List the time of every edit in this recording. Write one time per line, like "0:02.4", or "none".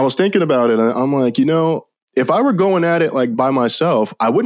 0:00.9
0:03.4